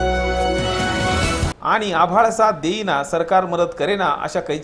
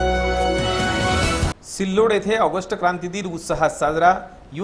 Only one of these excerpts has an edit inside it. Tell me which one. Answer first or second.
second